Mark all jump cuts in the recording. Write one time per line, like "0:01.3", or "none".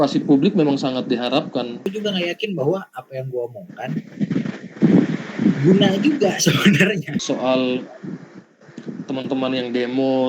0:01.9
0:07.1